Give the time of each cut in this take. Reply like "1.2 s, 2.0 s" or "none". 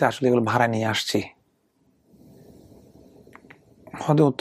2.0 s